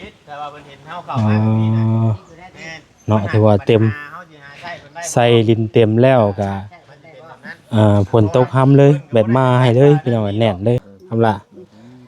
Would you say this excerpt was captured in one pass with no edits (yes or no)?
no